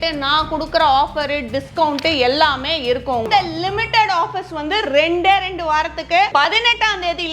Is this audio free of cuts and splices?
no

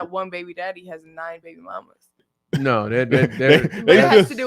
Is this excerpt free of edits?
no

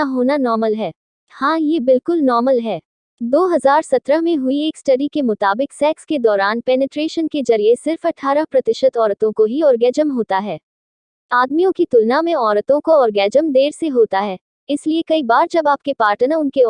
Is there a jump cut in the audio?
yes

